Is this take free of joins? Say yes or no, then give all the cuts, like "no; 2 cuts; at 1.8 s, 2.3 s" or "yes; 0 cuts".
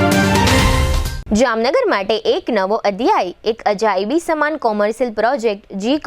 no; 1 cut; at 1.0 s